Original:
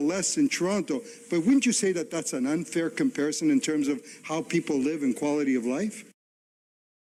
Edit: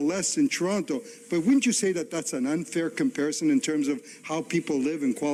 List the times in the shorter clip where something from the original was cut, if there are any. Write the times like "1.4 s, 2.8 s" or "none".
none